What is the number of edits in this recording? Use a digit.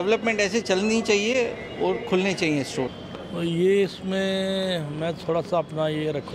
0